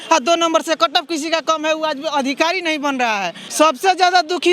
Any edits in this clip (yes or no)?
yes